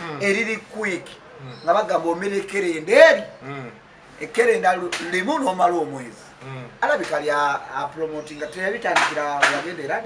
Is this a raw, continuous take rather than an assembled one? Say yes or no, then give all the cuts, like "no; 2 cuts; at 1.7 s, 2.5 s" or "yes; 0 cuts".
yes; 0 cuts